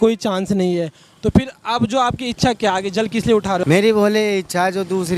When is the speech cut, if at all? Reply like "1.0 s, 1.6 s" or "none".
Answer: 3.6 s

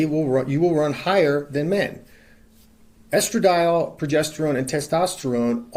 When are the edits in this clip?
none

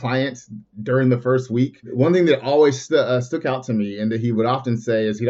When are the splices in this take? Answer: 1.9 s, 2.8 s

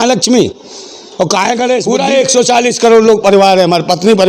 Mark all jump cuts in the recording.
1.9 s

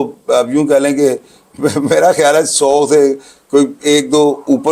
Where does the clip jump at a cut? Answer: none

